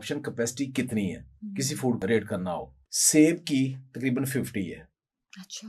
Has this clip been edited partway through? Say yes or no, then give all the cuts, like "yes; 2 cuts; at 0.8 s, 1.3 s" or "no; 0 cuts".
yes; 1 cut; at 2.0 s